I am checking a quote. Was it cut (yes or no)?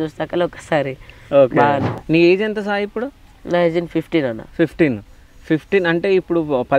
yes